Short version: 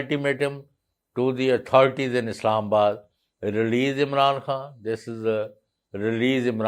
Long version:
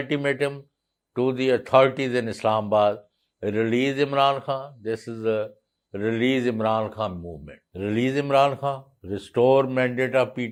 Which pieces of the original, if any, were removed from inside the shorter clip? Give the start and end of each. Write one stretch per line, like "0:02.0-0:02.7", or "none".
none